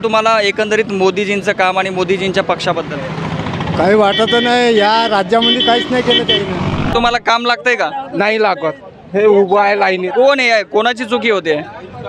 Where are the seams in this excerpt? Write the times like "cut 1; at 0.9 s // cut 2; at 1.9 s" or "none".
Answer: cut 1; at 6.9 s